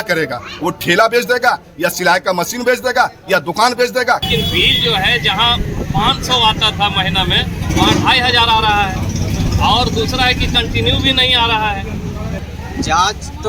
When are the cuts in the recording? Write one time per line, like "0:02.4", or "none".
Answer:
0:04.2
0:12.5